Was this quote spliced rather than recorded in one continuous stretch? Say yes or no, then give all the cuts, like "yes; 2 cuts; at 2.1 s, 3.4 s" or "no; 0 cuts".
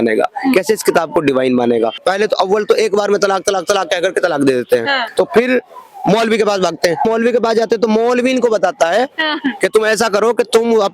yes; 2 cuts; at 2.0 s, 5.0 s